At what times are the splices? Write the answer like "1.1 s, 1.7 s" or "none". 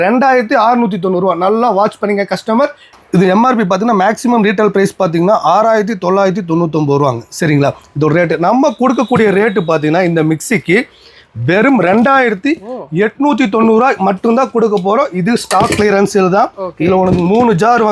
2.8 s